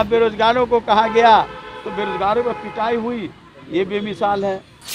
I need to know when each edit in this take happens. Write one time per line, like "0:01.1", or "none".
none